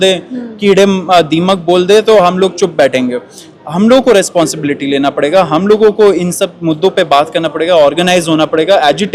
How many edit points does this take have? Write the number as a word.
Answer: zero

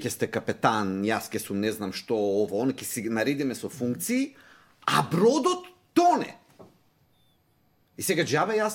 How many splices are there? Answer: zero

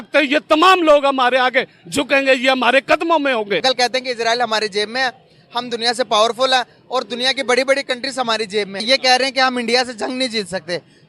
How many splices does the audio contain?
two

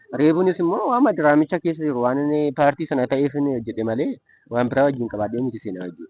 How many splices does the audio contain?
zero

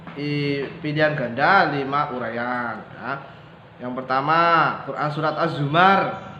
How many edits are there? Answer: zero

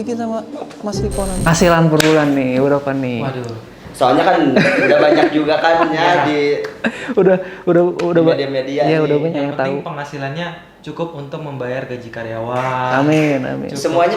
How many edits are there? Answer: one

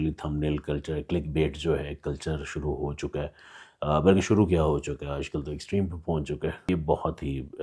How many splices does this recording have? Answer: one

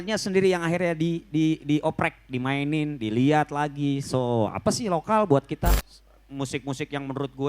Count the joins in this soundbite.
one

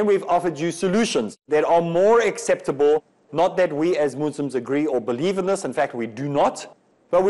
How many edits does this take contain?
one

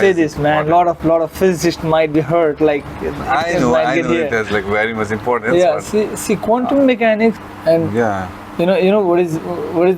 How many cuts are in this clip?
one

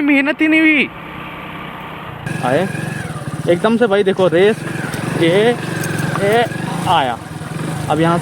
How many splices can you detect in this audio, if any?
one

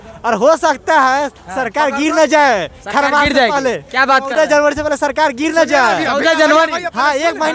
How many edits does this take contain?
zero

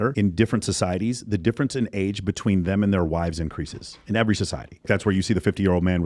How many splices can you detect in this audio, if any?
one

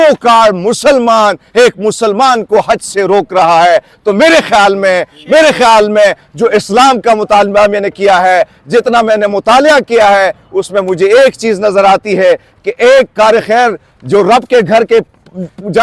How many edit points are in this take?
zero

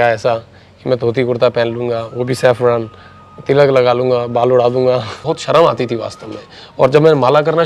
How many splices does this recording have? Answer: one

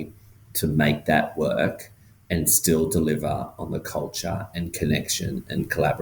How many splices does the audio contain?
zero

